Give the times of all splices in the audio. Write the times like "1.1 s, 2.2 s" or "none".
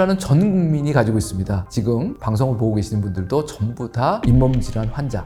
none